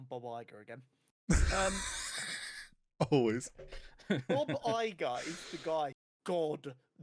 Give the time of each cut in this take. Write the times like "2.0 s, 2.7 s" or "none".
6.1 s